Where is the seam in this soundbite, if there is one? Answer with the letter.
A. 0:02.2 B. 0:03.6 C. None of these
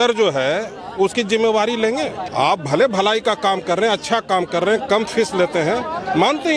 A